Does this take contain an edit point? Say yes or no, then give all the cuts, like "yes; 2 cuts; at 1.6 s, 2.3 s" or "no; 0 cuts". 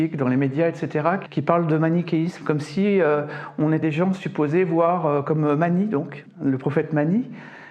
yes; 3 cuts; at 1.2 s, 3.8 s, 6.2 s